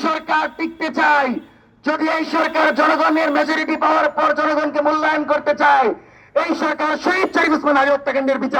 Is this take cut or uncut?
uncut